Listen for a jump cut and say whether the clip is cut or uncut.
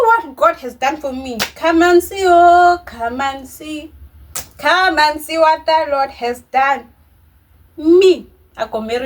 uncut